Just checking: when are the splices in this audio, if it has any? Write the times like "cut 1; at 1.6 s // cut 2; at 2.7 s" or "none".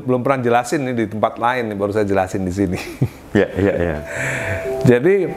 none